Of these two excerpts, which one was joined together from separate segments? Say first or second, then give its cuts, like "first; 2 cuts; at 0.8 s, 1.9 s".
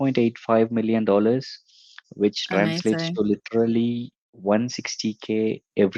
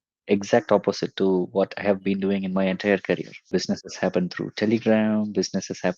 second; 1 cut; at 3.4 s